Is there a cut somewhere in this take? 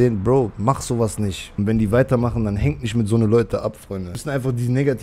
yes; 2 cuts; at 1.4 s, 4.2 s

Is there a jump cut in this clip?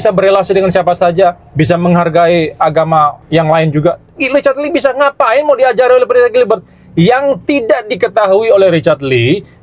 yes; 2 cuts; at 1.5 s, 3.2 s

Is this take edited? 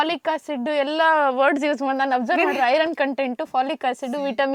no; 0 cuts

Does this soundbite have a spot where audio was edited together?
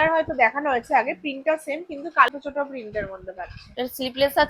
yes; 1 cut; at 2.3 s

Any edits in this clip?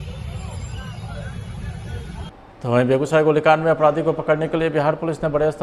yes; 1 cut; at 2.5 s

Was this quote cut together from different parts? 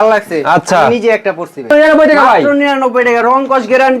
yes; 1 cut; at 1.7 s

